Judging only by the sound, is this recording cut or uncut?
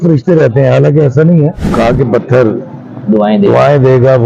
cut